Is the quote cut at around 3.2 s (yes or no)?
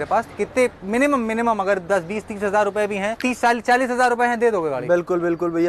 yes